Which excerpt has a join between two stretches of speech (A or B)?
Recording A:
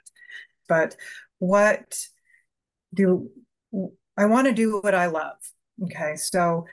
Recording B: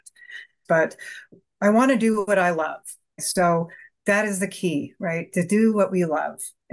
B